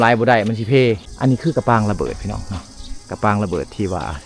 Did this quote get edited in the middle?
yes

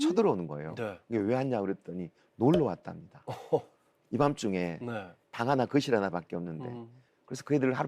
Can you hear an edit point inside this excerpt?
yes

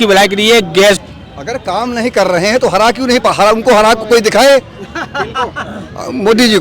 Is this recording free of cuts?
no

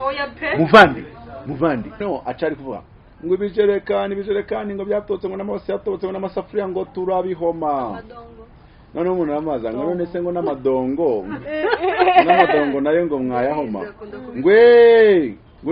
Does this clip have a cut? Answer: yes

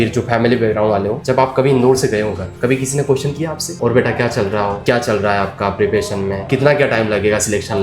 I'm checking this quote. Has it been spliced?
no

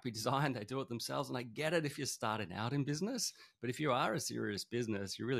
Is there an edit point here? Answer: no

